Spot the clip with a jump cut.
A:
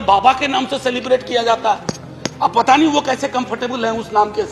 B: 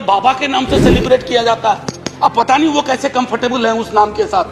B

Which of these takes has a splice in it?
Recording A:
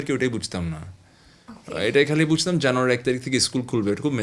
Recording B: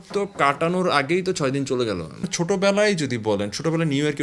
B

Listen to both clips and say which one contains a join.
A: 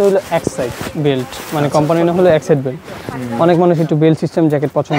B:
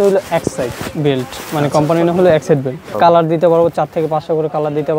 B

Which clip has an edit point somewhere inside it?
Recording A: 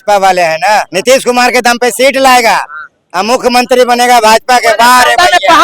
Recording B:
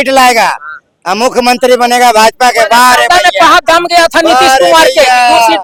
A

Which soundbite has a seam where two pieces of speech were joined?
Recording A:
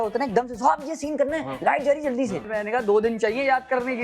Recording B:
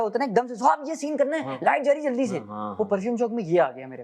A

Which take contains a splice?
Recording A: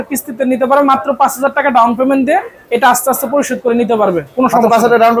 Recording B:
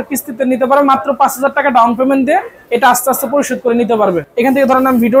B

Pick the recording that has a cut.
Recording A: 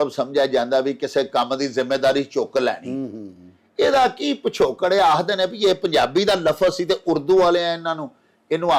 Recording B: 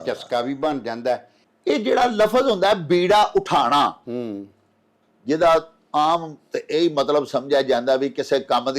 B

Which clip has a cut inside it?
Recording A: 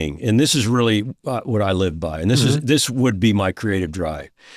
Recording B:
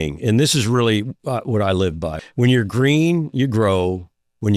B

